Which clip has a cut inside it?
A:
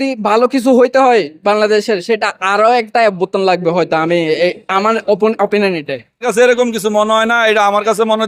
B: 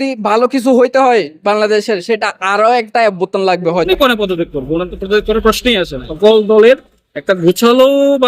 B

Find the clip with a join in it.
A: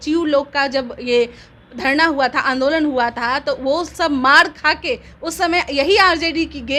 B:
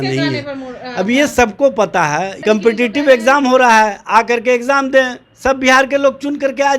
B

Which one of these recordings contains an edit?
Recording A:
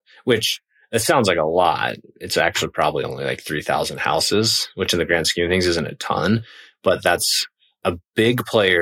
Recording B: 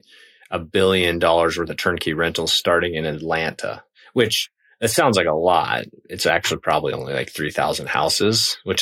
A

